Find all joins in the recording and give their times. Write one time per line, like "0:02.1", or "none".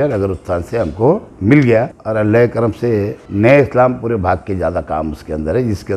0:01.3
0:02.0
0:03.2